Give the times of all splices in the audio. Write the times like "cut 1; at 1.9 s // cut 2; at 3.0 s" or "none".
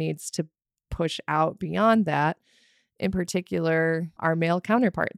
cut 1; at 4.2 s